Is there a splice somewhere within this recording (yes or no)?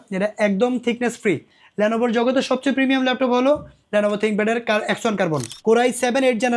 yes